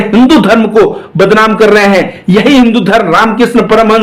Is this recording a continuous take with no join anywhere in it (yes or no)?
yes